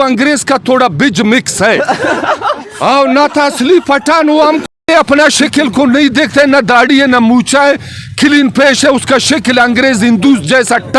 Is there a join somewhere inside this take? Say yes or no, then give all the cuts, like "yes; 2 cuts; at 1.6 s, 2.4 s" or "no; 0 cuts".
yes; 1 cut; at 4.9 s